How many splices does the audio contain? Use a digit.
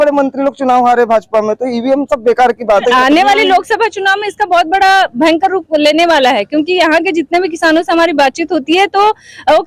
1